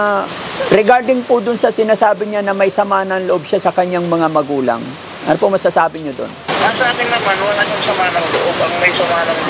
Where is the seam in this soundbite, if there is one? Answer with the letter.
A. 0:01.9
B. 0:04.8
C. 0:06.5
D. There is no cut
C